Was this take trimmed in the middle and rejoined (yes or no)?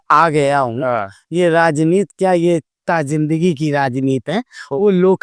no